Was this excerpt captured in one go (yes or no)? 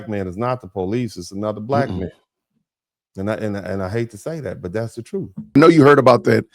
no